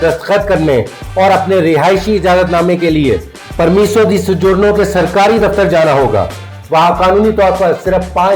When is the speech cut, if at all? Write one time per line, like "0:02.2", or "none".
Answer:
0:06.5